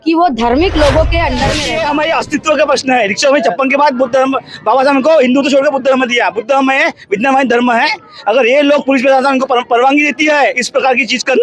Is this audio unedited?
no; 1 cut; at 1.6 s

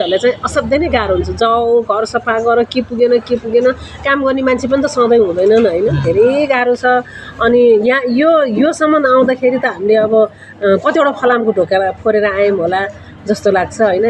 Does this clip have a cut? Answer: no; 0 cuts

